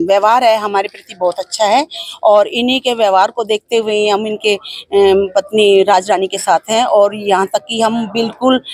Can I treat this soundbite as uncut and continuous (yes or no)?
yes